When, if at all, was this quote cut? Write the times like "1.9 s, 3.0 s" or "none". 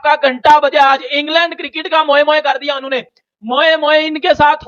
none